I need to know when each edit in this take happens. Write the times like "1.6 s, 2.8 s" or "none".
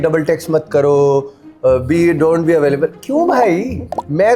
none